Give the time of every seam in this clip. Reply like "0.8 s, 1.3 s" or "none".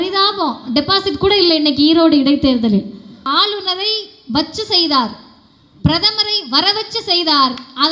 3.2 s